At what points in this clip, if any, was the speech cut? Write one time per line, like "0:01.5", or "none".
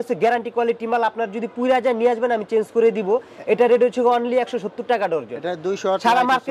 none